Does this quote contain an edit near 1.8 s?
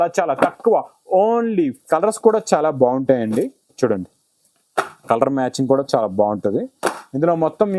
yes; 1 cut; at 1.8 s

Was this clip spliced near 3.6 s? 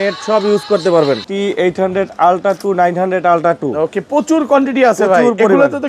no; 1 cut; at 1.2 s

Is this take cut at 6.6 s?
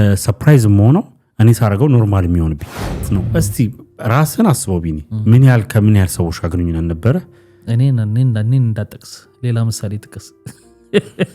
no; 1 cut; at 3.0 s

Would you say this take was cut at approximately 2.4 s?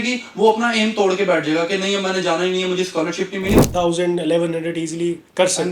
no; 1 cut; at 3.7 s

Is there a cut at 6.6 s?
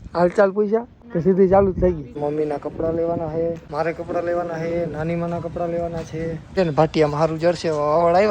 yes; 4 cuts; at 1.0 s, 2.2 s, 3.6 s, 6.6 s

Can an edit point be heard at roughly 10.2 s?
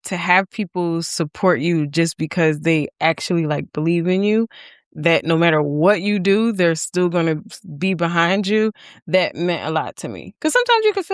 yes; 1 cut; at 10.2 s

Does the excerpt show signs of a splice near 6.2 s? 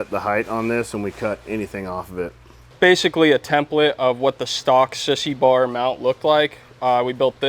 no; 1 cut; at 2.7 s

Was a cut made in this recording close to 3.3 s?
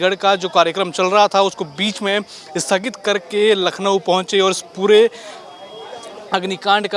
no; 0 cuts

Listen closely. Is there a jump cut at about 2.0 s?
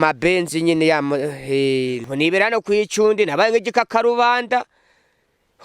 yes; 1 cut; at 2.0 s

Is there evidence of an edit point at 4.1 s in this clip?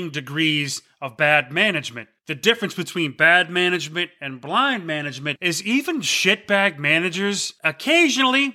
no; 0 cuts

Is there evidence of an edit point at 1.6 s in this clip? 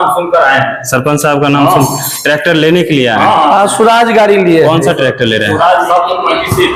no; 0 cuts

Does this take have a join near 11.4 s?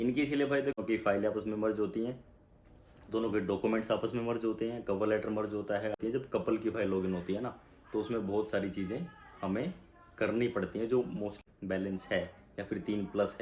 yes; 3 cuts; at 0.8 s, 6.0 s, 11.4 s

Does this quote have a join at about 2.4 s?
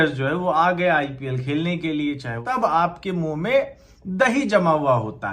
yes; 1 cut; at 2.4 s

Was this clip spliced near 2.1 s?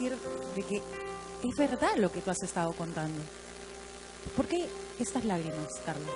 no; 0 cuts

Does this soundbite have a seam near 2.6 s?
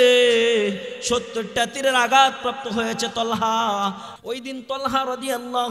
no; 1 cut; at 4.1 s

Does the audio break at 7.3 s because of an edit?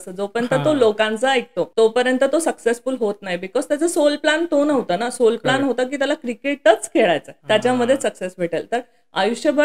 yes; 2 cuts; at 1.6 s, 7.3 s

